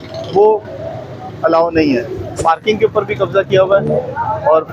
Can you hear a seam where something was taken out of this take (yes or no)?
yes